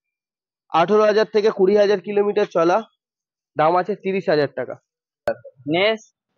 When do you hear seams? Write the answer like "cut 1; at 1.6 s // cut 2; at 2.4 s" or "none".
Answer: cut 1; at 5.3 s